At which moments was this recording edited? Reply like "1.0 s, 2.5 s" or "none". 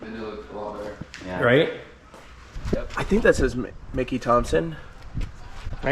2.5 s